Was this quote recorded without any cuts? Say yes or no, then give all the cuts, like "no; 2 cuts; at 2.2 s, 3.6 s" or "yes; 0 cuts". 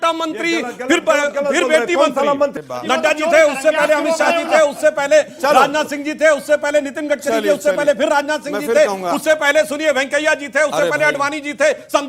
no; 1 cut; at 2.6 s